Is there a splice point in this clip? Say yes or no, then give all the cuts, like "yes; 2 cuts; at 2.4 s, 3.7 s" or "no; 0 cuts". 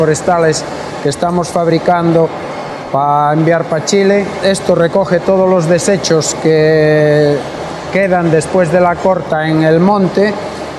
yes; 1 cut; at 4.3 s